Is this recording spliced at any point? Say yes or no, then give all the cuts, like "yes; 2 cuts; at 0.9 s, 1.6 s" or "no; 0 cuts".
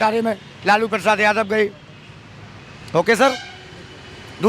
no; 0 cuts